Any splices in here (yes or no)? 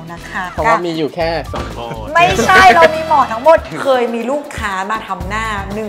yes